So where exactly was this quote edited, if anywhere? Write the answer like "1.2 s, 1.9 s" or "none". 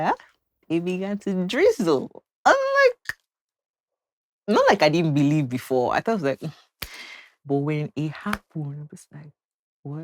7.3 s

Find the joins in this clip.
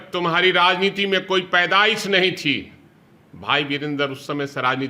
none

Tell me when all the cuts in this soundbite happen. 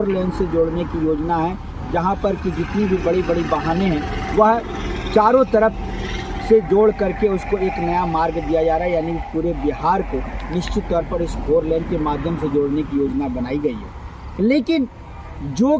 none

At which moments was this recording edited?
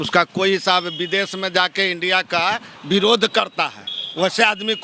none

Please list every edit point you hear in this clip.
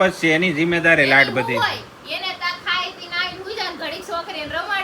none

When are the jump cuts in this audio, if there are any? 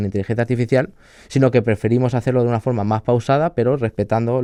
none

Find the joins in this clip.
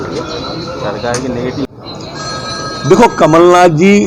1.8 s

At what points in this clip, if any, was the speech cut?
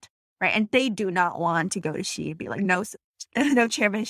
2.9 s

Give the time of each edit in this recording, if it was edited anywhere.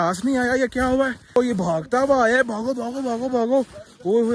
1.4 s

